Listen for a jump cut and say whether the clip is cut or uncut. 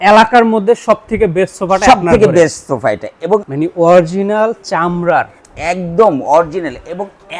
cut